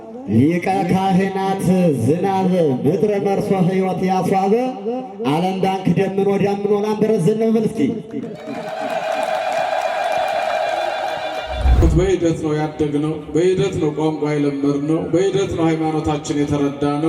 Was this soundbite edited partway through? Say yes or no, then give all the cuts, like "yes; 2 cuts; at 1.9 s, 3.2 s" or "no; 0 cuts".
yes; 1 cut; at 11.8 s